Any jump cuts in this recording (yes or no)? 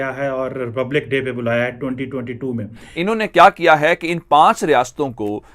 yes